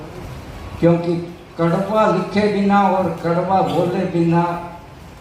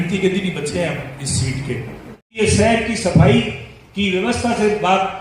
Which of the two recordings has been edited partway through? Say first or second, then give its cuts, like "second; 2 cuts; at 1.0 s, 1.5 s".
second; 1 cut; at 2.4 s